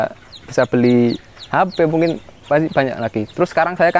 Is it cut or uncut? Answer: uncut